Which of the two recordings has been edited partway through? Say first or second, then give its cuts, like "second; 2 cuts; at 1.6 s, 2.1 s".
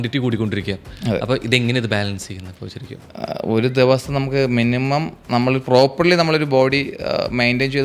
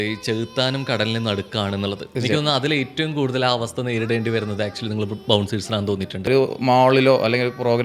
second; 2 cuts; at 2.1 s, 6.3 s